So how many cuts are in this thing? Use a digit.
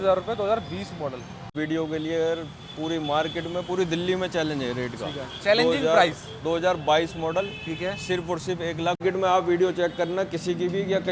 2